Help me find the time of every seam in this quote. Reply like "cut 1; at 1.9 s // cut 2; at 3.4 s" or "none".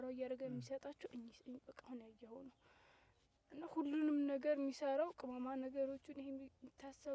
none

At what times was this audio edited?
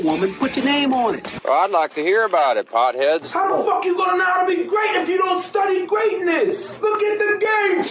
cut 1; at 4.9 s

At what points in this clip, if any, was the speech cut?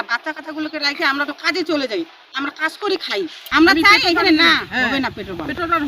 cut 1; at 3.4 s

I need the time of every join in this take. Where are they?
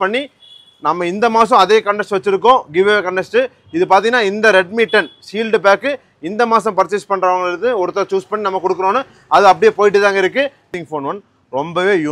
cut 1; at 10.6 s

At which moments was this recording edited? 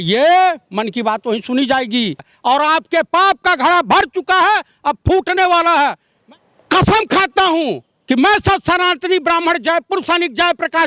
cut 1; at 2.3 s // cut 2; at 6.1 s

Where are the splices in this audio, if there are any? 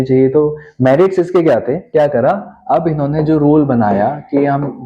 cut 1; at 1.8 s

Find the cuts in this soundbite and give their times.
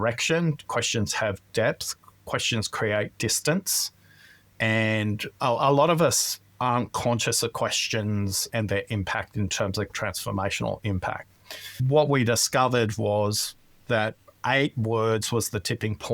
cut 1; at 8.5 s // cut 2; at 9.9 s // cut 3; at 11.8 s

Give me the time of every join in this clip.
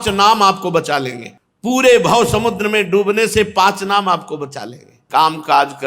cut 1; at 5.0 s

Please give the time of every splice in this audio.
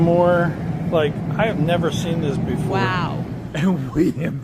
cut 1; at 3.4 s

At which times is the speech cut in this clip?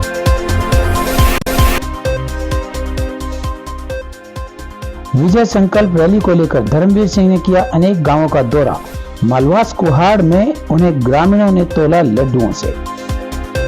cut 1; at 1.3 s

